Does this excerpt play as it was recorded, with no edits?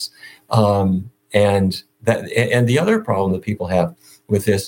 yes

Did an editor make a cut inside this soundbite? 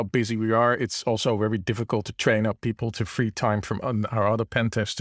no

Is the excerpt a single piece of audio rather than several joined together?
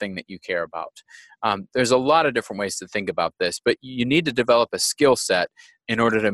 yes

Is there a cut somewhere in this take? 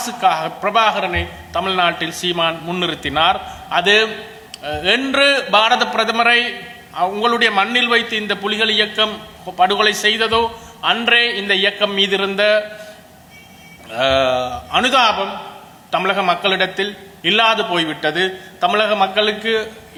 no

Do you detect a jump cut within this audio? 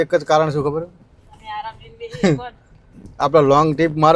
no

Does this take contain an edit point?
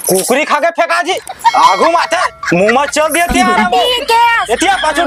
no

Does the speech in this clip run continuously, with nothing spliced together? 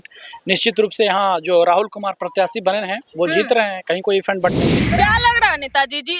no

